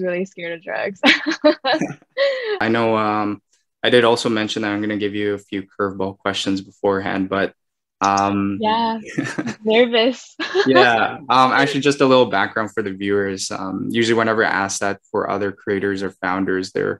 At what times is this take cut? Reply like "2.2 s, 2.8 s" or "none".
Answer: 2.6 s

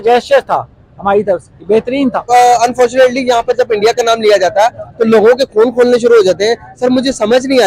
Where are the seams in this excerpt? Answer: 2.2 s

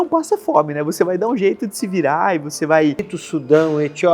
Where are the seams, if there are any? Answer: 3.2 s

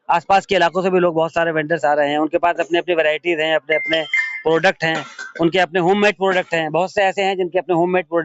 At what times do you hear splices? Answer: none

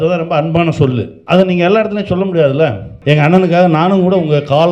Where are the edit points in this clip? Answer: 1.1 s, 2.9 s

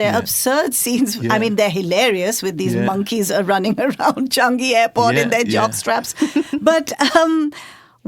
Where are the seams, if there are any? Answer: none

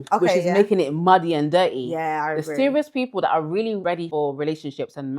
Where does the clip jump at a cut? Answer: 4.0 s

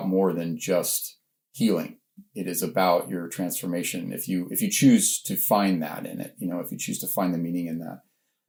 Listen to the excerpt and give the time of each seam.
none

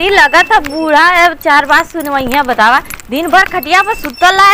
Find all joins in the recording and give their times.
none

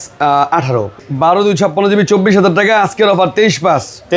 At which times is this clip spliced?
1.0 s

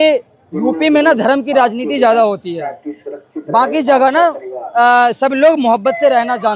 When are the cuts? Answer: none

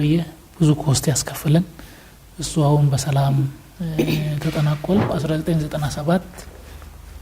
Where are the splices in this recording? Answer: 5.1 s

